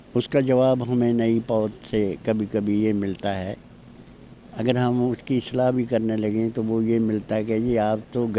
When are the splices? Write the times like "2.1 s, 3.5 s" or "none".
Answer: none